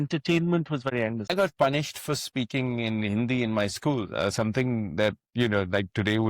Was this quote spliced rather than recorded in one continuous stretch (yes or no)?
yes